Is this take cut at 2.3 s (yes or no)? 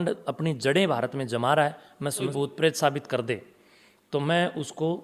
yes